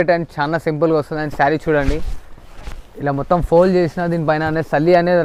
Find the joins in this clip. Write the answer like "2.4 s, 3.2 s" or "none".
none